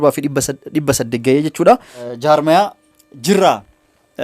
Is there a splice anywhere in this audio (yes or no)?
yes